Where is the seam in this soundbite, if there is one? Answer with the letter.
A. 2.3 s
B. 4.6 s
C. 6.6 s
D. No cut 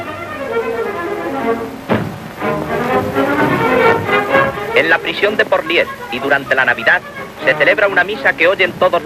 C